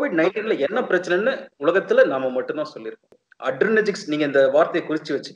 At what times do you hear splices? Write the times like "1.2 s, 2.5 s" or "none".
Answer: 3.1 s